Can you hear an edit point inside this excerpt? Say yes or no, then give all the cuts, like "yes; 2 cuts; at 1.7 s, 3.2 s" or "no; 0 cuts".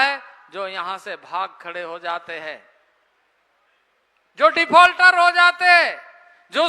no; 0 cuts